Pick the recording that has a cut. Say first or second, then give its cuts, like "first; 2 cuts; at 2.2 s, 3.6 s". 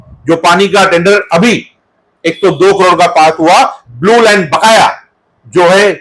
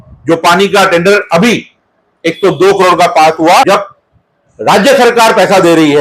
second; 1 cut; at 3.7 s